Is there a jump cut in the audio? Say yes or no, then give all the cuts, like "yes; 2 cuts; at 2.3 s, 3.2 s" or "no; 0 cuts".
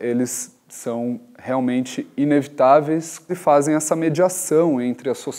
yes; 1 cut; at 3.2 s